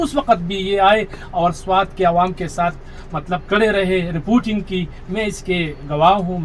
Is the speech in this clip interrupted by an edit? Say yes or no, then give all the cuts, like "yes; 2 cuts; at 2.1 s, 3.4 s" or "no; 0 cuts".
no; 0 cuts